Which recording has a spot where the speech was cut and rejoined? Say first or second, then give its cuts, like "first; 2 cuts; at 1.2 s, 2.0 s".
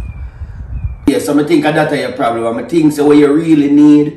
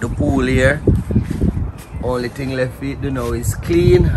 first; 1 cut; at 1.1 s